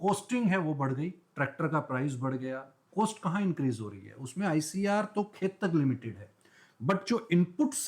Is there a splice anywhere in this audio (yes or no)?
no